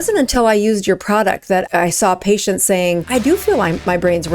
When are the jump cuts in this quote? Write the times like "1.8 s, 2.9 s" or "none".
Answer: 1.7 s, 3.0 s